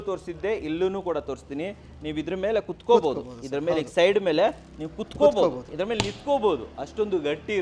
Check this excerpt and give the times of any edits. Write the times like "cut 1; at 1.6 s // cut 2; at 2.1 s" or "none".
none